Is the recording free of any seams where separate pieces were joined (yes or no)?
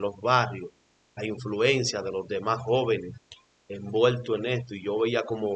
yes